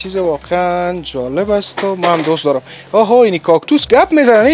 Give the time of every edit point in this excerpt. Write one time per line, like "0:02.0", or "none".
none

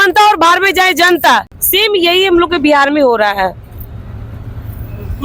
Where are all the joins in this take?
none

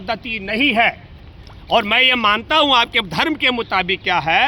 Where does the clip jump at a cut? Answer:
none

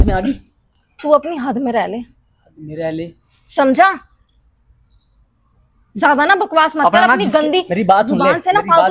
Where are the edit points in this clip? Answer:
none

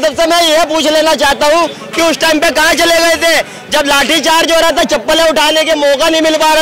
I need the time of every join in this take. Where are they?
none

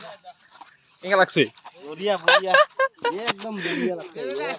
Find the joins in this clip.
none

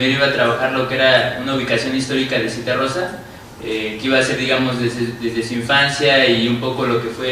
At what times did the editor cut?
none

